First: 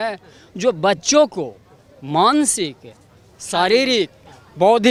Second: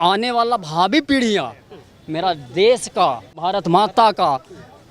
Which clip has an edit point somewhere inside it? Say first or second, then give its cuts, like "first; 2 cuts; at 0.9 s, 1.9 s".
second; 1 cut; at 3.4 s